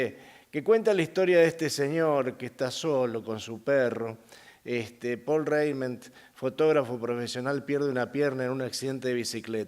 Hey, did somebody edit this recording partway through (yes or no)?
yes